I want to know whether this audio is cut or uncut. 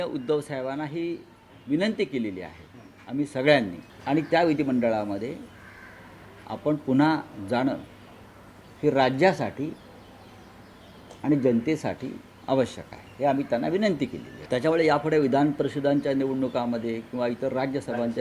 cut